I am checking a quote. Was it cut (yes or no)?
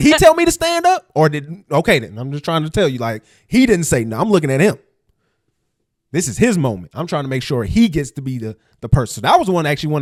no